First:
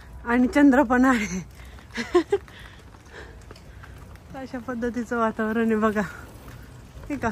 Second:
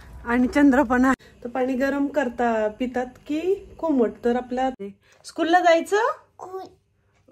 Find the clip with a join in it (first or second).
second